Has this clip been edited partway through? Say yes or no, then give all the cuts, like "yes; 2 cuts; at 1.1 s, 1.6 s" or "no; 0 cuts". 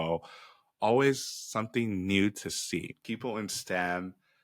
yes; 1 cut; at 3.0 s